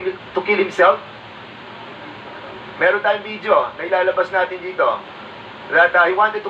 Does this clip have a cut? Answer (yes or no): no